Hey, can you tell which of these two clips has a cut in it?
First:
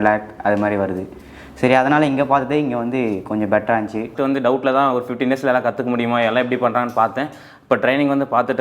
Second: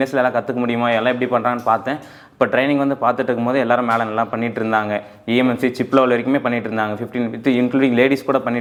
first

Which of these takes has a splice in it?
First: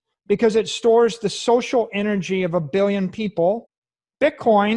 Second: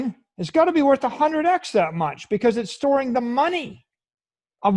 first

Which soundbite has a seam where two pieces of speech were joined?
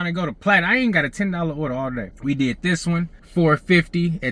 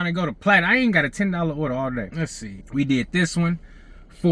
first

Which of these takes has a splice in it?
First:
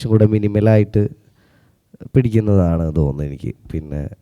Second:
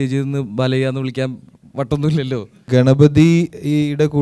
second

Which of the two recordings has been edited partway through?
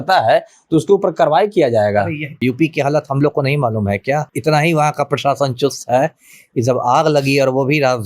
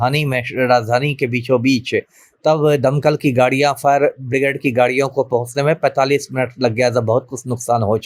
first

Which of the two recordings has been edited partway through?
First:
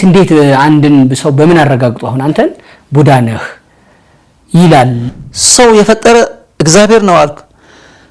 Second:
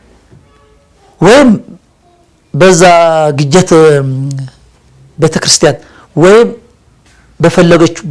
first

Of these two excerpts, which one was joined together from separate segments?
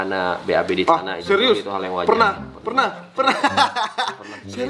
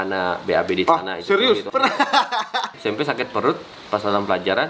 second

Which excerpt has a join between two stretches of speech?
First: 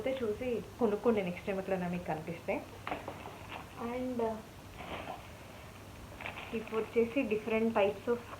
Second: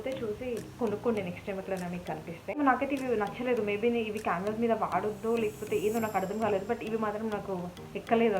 second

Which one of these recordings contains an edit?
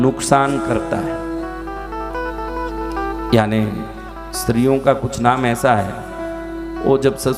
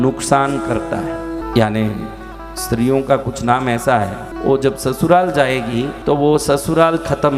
second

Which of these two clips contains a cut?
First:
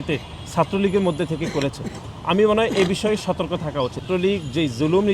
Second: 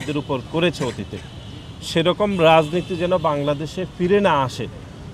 first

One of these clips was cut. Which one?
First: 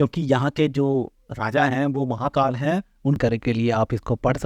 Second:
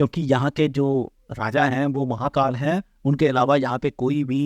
first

